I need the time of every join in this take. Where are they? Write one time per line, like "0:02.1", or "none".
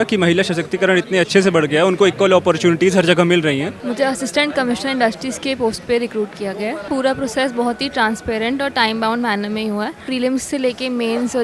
0:03.7
0:06.9
0:10.0